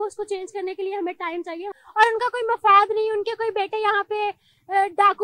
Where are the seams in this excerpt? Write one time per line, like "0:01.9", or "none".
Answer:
0:01.8